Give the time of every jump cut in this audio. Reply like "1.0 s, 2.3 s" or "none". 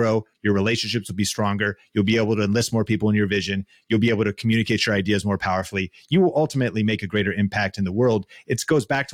none